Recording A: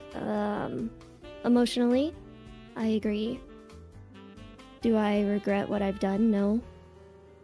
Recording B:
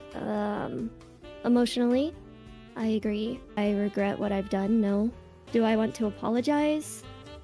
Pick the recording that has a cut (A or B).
B